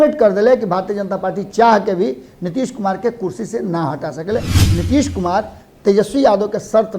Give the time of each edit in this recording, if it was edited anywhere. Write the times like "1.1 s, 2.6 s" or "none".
4.6 s